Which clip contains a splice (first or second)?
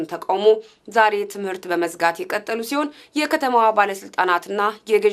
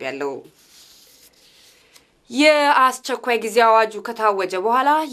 first